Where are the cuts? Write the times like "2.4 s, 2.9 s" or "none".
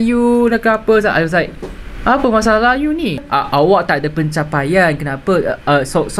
3.3 s